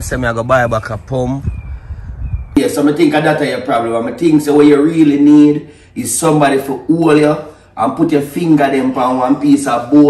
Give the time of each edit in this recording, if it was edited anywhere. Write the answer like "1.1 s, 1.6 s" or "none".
2.6 s